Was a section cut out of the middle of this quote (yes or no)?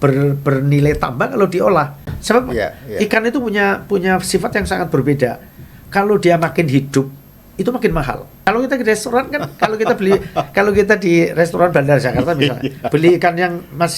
yes